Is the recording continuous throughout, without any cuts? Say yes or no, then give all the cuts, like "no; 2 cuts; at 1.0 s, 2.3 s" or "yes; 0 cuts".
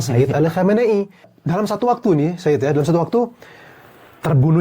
no; 1 cut; at 1.4 s